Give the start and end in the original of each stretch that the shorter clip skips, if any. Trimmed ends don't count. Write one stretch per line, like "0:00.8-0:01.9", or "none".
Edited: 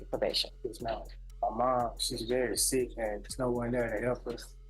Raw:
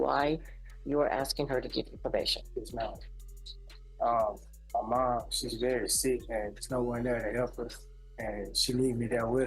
0:03.1-0:04.5